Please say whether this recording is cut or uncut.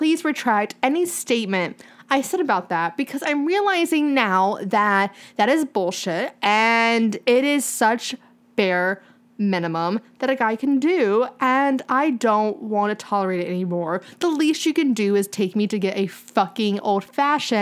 uncut